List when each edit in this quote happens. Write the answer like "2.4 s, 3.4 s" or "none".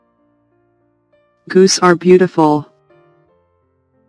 1.5 s, 3.3 s